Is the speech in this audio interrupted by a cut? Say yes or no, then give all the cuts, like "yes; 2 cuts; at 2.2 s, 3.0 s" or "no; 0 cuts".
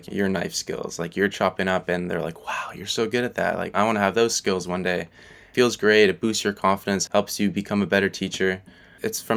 no; 0 cuts